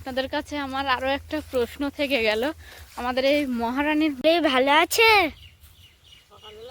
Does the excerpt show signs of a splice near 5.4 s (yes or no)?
no